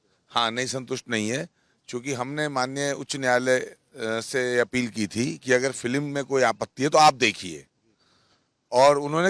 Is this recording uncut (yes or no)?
yes